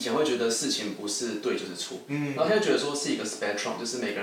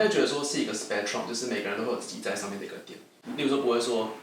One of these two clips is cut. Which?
second; 1 cut; at 3.1 s

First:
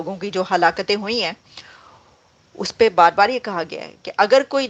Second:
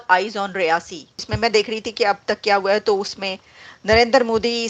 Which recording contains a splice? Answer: second; 1 cut; at 1.3 s

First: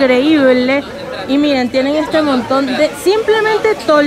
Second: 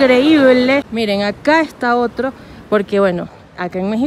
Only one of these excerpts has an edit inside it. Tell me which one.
second; 1 cut; at 0.9 s

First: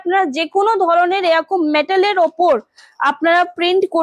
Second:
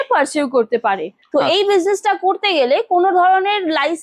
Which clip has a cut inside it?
second; 1 cut; at 1.1 s

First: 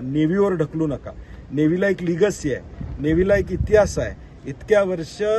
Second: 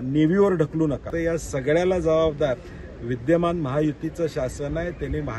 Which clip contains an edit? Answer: second; 1 cut; at 1.1 s

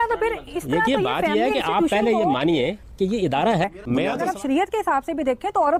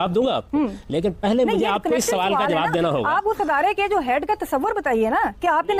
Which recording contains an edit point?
first; 1 cut; at 4.0 s

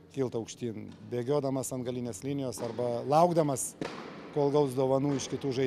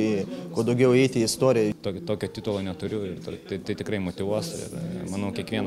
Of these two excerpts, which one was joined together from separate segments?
second; 1 cut; at 1.8 s

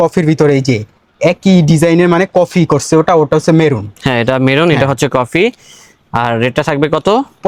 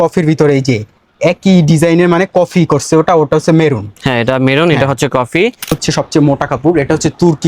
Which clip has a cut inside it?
second; 1 cut; at 5.8 s

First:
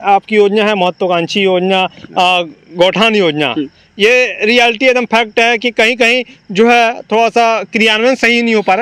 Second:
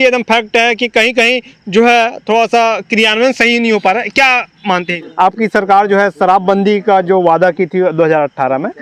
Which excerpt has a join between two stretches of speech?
second; 1 cut; at 5.0 s

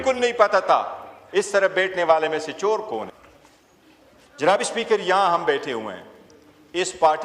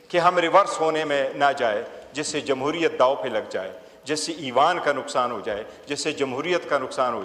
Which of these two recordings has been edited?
first; 1 cut; at 3.1 s

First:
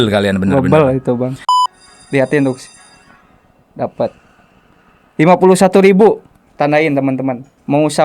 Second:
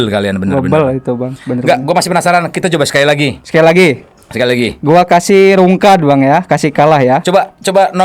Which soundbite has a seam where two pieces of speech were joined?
first; 1 cut; at 1.4 s

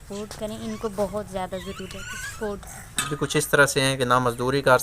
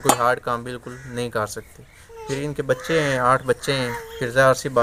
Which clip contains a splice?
first; 1 cut; at 3.1 s

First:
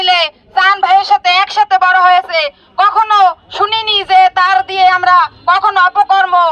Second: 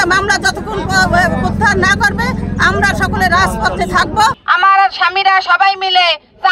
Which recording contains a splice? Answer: second; 1 cut; at 4.4 s

